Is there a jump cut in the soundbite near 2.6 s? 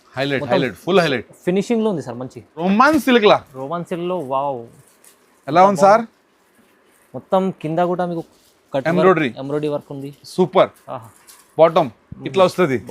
yes; 1 cut; at 2.6 s

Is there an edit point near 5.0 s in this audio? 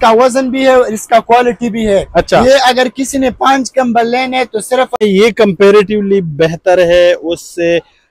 yes; 1 cut; at 5.0 s

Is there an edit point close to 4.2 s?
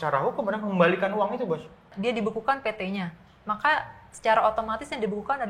no; 1 cut; at 1.9 s

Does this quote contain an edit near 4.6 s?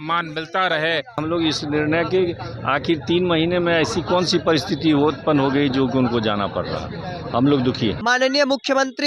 no; 2 cuts; at 1.2 s, 8.0 s

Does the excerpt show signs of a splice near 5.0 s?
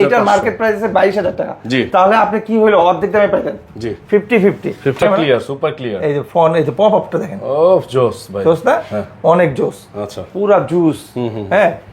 yes; 1 cut; at 5.0 s

